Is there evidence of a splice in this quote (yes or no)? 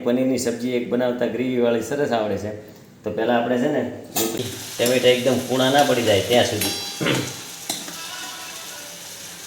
yes